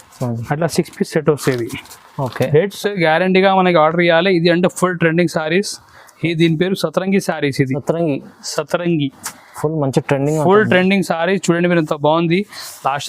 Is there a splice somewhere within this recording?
yes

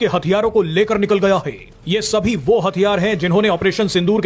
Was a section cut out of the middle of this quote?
no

